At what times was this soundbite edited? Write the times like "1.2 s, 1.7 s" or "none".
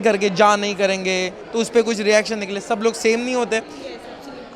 none